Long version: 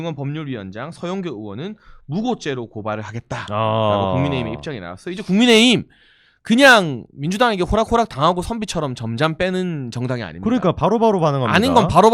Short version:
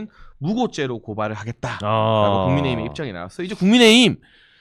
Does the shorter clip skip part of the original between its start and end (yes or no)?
no